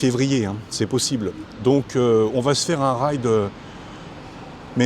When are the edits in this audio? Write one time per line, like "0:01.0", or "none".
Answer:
none